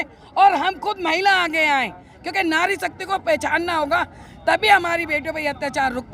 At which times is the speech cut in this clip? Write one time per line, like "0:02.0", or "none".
none